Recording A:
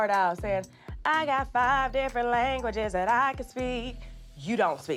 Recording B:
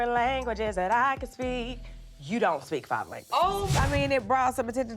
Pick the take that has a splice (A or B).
B